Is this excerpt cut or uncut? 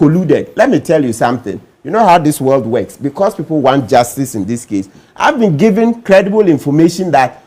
uncut